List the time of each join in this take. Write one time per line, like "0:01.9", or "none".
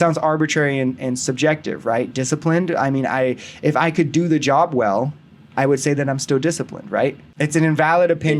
0:07.3